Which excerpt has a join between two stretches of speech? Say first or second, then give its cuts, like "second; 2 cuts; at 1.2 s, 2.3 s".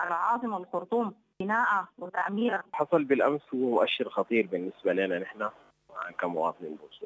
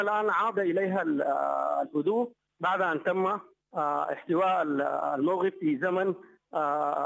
first; 2 cuts; at 1.3 s, 2.7 s